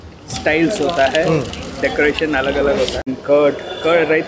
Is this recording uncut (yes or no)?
no